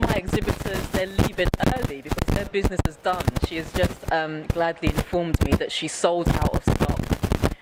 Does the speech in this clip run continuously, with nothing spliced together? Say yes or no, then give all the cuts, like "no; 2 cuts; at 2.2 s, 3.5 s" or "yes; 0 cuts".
yes; 0 cuts